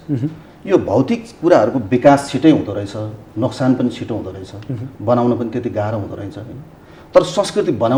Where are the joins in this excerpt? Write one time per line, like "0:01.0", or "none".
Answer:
none